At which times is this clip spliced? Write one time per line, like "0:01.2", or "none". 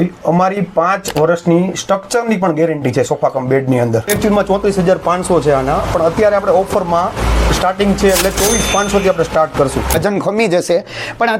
0:04.1
0:10.0